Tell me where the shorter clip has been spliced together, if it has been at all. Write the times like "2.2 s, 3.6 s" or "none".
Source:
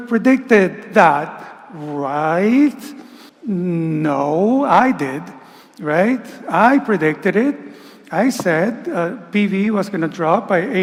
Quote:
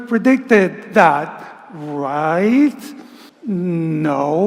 none